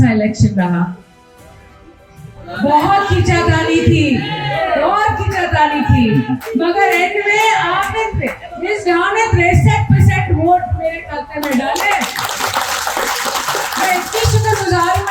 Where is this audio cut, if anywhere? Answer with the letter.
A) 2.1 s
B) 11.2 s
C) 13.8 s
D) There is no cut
D